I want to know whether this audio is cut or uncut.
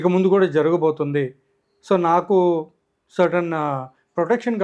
uncut